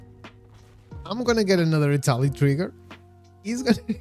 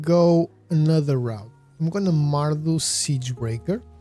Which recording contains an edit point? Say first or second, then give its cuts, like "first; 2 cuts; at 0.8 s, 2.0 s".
first; 1 cut; at 1.0 s